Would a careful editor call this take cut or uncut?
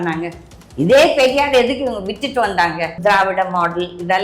cut